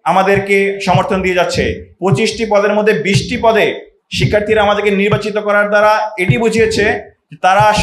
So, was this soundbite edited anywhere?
yes; 1 cut; at 1.9 s

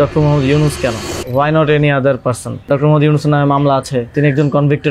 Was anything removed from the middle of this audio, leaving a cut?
yes; 3 cuts; at 1.1 s, 2.7 s, 4.1 s

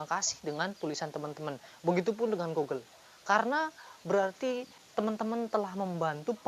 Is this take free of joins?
no; 1 cut; at 4.8 s

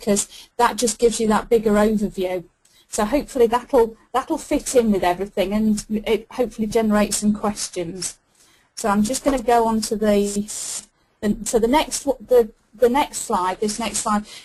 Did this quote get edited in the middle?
yes; 1 cut; at 6.5 s

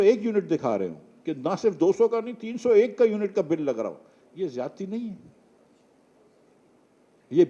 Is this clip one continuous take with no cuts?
yes; 0 cuts

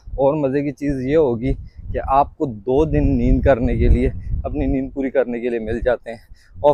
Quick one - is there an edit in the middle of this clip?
no; 0 cuts

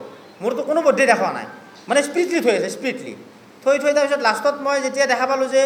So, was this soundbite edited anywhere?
no; 0 cuts

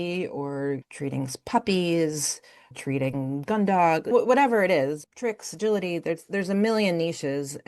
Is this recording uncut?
no; 4 cuts; at 0.9 s, 2.7 s, 4.1 s, 5.1 s

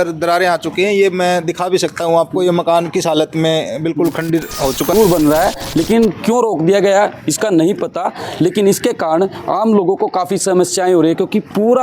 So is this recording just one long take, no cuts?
no; 1 cut; at 4.9 s

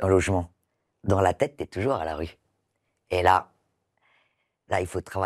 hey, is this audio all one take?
yes; 0 cuts

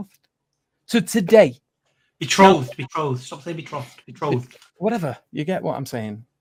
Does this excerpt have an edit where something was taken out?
no; 0 cuts

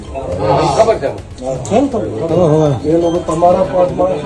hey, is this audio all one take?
yes; 0 cuts

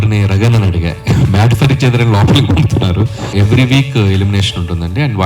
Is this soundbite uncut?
no; 1 cut; at 3.2 s

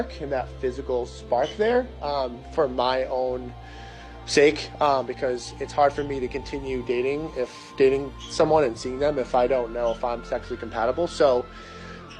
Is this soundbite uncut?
no; 2 cuts; at 2.8 s, 11.3 s

